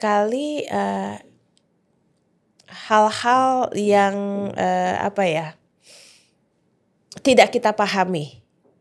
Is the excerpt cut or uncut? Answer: uncut